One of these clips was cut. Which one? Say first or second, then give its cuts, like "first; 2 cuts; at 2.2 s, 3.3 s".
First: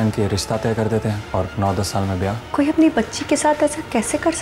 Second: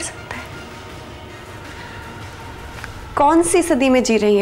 first; 2 cuts; at 1.2 s, 2.4 s